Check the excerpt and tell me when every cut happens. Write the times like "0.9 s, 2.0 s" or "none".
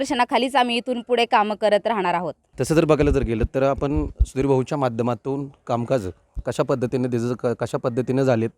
none